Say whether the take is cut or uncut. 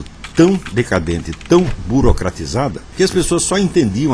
cut